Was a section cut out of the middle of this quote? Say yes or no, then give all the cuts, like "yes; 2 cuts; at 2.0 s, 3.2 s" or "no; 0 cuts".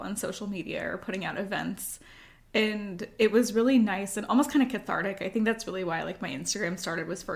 no; 0 cuts